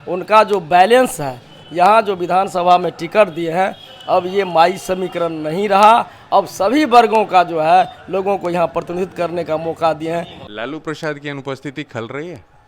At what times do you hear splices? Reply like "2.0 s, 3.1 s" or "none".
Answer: 10.4 s